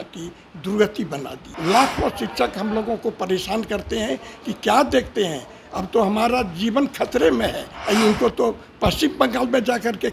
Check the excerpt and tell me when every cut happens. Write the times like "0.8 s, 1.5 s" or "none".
1.4 s, 7.7 s